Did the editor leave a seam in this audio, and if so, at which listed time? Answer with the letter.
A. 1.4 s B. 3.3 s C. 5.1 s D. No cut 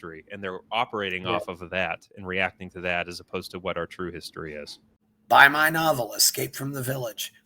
C